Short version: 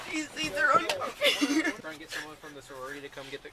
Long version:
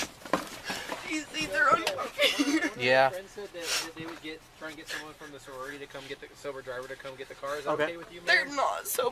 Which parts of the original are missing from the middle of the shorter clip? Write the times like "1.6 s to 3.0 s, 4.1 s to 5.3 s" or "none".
2.8 s to 4.6 s